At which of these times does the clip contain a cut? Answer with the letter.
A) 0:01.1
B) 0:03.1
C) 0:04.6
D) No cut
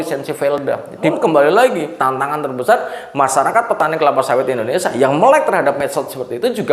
A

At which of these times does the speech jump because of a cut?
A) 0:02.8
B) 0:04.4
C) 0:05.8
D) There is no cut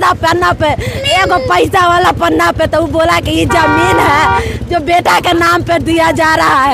D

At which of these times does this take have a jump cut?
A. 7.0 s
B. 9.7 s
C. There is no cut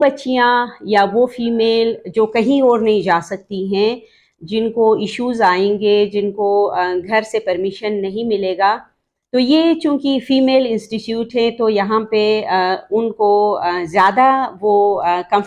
C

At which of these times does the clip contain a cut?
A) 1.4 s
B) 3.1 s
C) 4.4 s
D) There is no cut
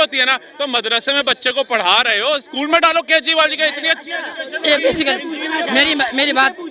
D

